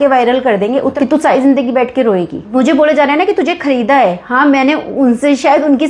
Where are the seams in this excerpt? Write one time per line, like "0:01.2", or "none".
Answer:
0:00.9
0:02.4

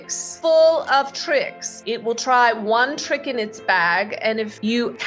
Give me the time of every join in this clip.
none

